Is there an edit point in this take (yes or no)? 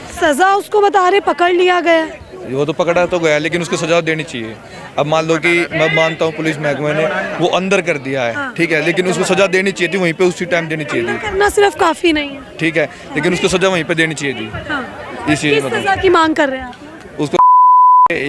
no